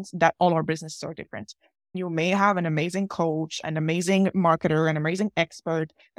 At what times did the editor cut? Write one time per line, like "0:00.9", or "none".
0:02.0